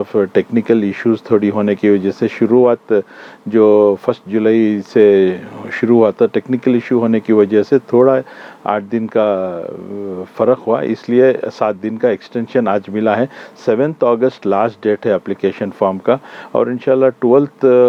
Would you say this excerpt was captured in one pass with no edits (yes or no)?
yes